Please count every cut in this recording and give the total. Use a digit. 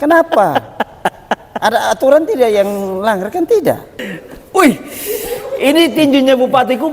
1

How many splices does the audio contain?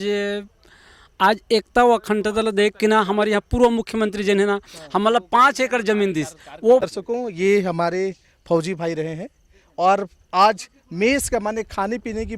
1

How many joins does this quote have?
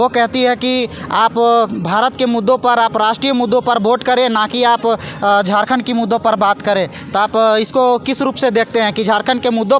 0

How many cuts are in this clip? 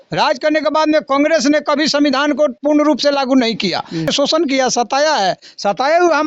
1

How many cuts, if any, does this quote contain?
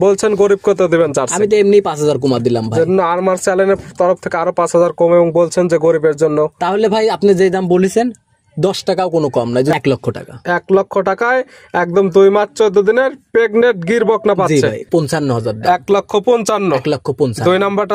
2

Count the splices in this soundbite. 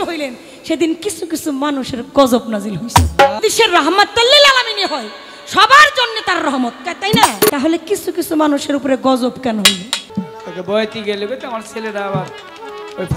3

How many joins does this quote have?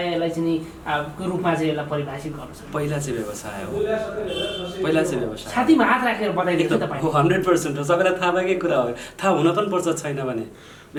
0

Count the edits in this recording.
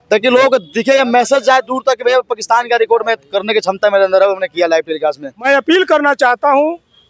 1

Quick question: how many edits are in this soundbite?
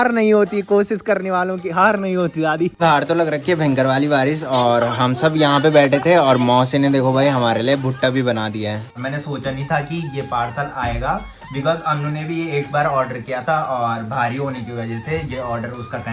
2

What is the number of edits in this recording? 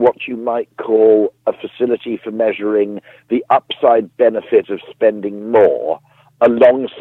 0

